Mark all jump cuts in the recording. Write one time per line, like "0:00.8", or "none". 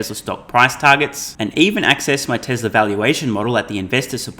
none

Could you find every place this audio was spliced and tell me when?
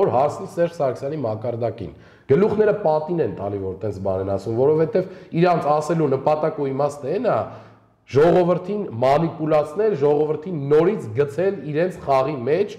none

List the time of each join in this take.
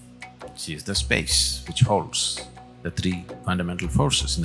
0:03.3

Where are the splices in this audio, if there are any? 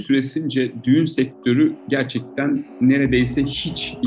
none

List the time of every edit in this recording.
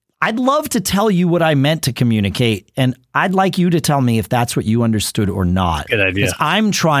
none

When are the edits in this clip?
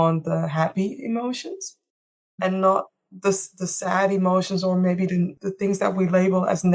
0:05.4

